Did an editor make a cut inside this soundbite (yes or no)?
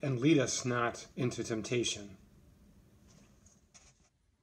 no